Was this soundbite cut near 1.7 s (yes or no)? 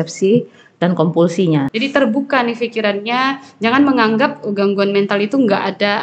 yes